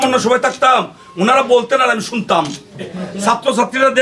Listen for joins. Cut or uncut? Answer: cut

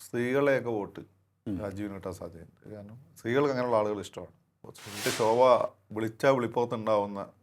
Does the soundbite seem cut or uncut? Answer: cut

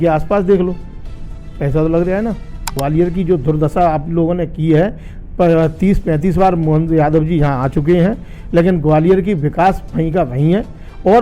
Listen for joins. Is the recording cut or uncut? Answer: cut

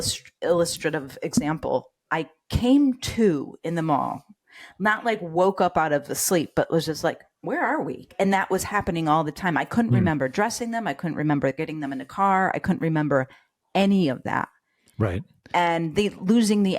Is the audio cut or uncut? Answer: cut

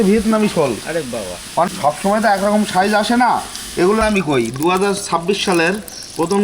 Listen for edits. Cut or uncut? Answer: cut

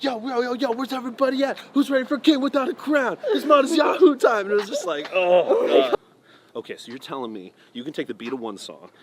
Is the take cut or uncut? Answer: cut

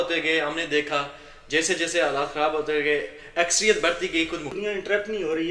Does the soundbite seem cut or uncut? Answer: cut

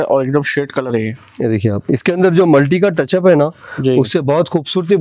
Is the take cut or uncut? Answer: uncut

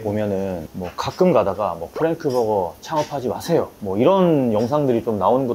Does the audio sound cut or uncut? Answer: uncut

